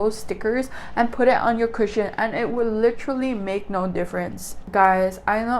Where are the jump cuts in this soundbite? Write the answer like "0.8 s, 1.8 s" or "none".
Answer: 4.5 s